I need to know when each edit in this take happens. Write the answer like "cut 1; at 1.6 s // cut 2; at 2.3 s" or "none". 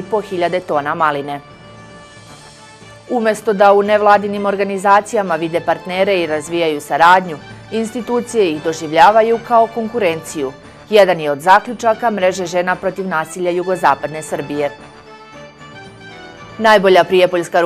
cut 1; at 15.0 s // cut 2; at 16.5 s